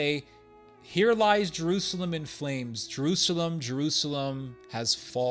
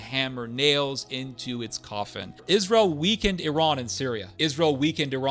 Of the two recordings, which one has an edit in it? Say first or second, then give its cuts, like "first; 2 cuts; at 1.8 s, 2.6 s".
second; 2 cuts; at 2.3 s, 4.3 s